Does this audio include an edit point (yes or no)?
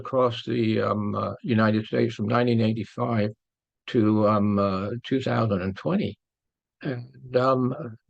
no